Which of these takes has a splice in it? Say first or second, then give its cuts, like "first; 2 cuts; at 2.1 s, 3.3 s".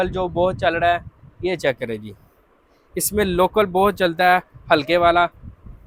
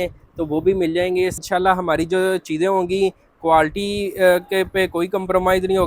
second; 1 cut; at 1.4 s